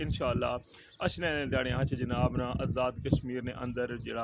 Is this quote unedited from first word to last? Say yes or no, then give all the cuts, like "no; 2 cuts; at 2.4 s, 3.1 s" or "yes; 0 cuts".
yes; 0 cuts